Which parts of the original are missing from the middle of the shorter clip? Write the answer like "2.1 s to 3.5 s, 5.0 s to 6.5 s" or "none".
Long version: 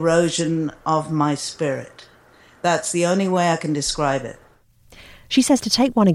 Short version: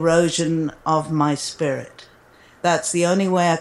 none

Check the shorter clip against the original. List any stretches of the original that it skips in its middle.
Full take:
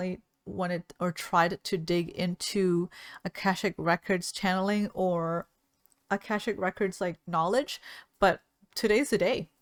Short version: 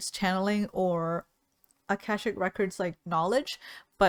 none

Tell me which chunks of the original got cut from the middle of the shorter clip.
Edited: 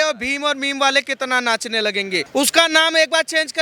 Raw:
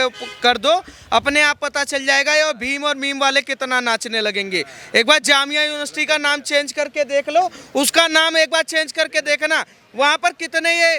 4.6 s to 7.6 s

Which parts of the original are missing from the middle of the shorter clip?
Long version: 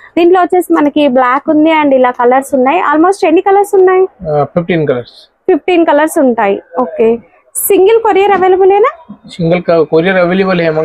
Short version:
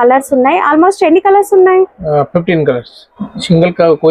5.3 s to 9.0 s

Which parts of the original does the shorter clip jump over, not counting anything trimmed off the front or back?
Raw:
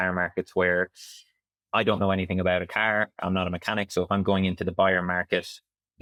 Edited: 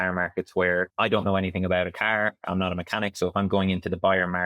0.9 s to 1.7 s

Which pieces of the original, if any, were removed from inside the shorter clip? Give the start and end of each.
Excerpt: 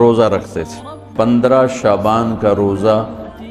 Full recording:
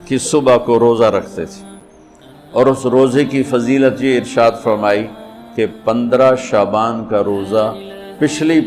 2.1 s to 5.9 s

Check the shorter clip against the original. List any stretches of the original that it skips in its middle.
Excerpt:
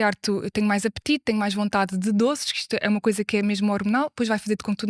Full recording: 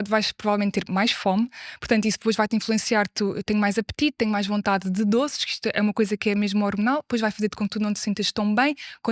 none

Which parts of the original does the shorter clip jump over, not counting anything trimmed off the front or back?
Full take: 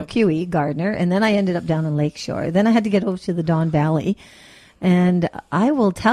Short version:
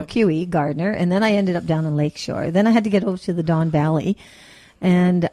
none

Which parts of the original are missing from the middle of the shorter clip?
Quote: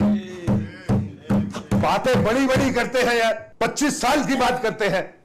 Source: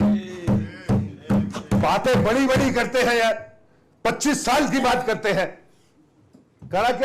3.5 s to 3.9 s

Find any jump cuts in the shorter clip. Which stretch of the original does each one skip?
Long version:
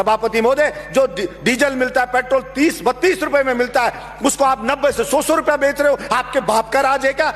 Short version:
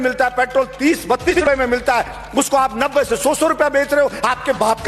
3.1 s to 3.2 s

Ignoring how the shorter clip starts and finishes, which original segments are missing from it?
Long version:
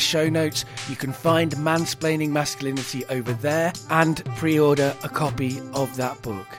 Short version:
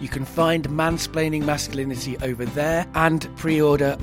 4.0 s to 4.1 s

